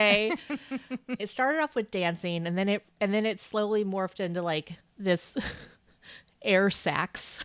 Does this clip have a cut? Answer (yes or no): yes